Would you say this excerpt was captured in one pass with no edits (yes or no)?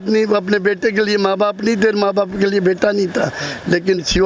yes